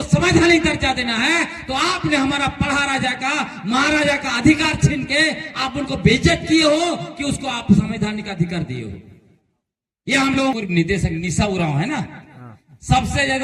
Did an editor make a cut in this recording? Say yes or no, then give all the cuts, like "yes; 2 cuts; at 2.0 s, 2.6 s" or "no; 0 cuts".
yes; 1 cut; at 10.5 s